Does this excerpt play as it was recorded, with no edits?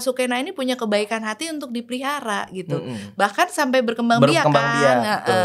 yes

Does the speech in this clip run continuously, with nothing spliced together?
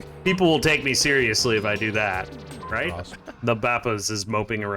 no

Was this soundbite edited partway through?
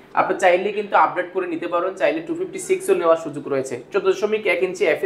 no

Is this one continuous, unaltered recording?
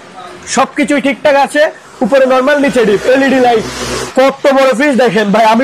no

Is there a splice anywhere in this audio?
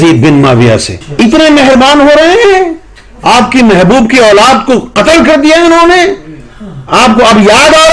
yes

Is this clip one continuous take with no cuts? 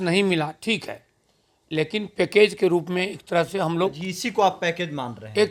yes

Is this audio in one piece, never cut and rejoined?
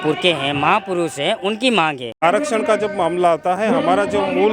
no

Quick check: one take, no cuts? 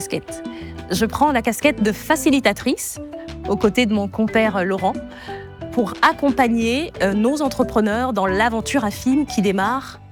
yes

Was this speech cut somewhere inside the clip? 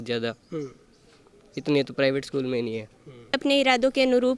yes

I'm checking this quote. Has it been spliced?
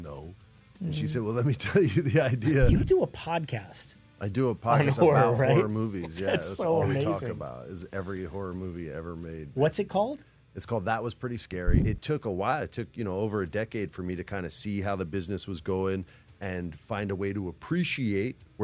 yes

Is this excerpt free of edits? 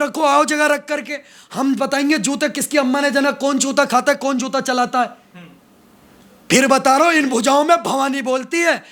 yes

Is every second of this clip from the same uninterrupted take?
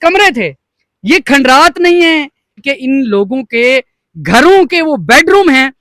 no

